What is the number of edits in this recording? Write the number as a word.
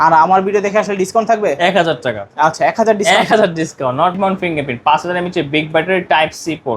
one